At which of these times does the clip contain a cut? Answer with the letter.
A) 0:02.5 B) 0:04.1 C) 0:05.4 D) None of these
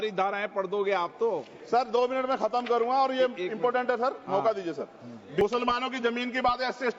C